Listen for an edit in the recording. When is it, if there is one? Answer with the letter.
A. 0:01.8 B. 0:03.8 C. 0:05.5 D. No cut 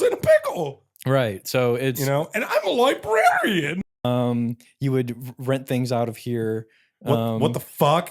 B